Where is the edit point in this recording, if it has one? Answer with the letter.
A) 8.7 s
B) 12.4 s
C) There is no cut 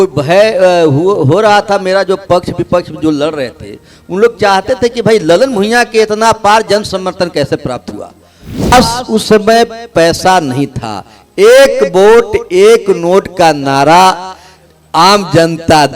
A